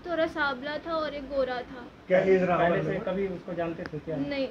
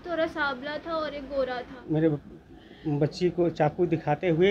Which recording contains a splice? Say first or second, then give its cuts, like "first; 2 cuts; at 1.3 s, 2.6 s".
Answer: second; 1 cut; at 1.8 s